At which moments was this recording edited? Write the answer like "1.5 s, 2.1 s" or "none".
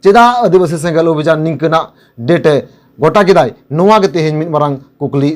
none